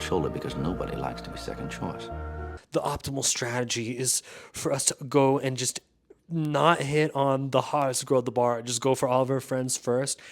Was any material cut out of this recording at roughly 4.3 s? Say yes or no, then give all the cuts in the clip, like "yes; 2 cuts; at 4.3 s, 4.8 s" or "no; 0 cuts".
no; 1 cut; at 2.6 s